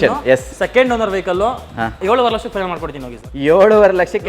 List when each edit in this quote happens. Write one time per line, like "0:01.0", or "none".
0:02.0